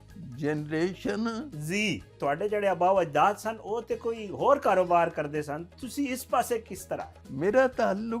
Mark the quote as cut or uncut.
cut